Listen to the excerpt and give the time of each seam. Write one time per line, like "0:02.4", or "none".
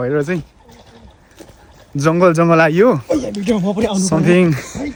none

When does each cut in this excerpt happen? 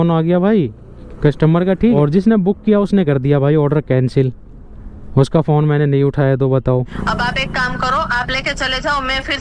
0:02.0
0:07.0

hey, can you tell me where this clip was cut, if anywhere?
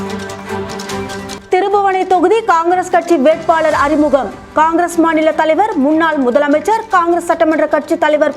0:01.2

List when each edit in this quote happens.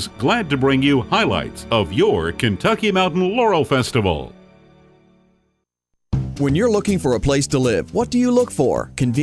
0:06.0

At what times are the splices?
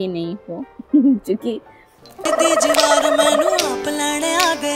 0:02.3

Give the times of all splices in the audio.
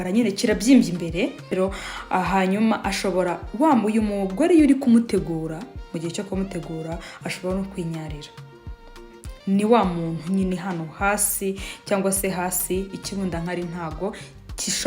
0:01.5

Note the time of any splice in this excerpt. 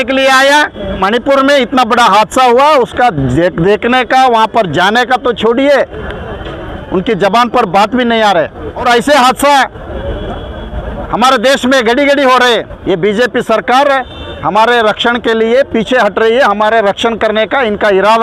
0:01.0
0:08.8
0:12.7

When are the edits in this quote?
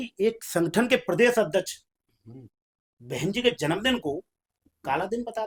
none

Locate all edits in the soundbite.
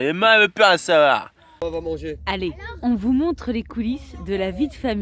0:01.4

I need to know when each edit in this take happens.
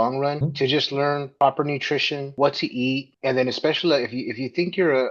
0:01.3

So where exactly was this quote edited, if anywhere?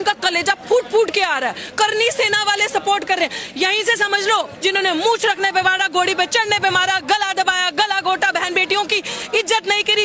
0:04.5

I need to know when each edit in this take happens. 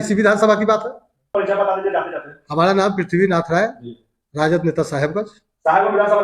0:01.3

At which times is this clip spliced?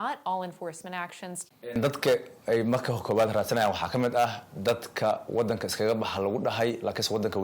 0:01.8

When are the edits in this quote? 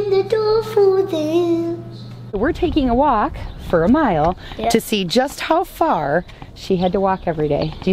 0:02.4

